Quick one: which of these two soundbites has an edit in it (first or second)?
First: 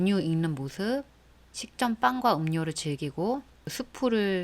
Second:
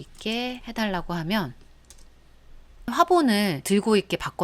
first